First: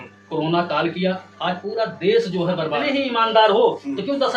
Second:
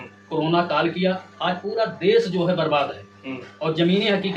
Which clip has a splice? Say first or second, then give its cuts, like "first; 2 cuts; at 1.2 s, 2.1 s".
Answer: first; 1 cut; at 2.8 s